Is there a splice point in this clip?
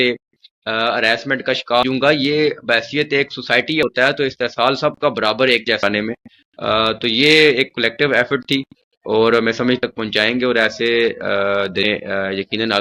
yes; 5 cuts; at 1.8 s, 3.8 s, 5.8 s, 9.8 s, 11.8 s

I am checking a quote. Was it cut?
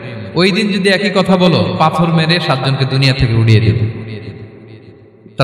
no; 0 cuts

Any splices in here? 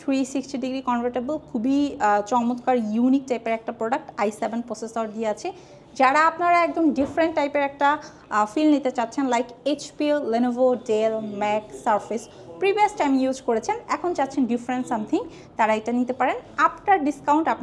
no; 0 cuts

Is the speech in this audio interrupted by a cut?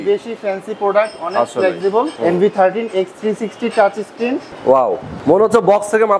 yes; 3 cuts; at 2.1 s, 4.5 s, 5.1 s

